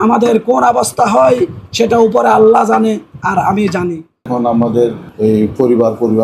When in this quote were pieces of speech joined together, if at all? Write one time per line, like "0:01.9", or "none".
none